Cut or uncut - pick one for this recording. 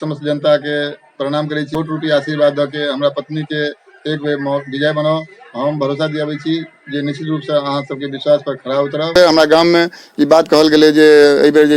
cut